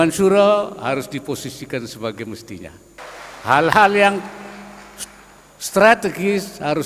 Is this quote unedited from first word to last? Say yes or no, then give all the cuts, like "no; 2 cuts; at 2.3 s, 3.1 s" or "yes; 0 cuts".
no; 1 cut; at 3.0 s